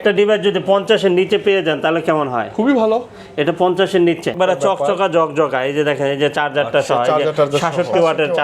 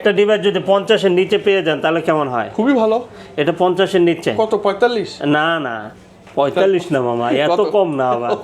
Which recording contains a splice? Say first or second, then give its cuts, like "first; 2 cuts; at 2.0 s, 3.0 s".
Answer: first; 1 cut; at 4.3 s